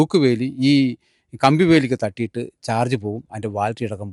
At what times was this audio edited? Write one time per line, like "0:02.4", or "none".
none